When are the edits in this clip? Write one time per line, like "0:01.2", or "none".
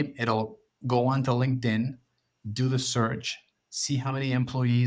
none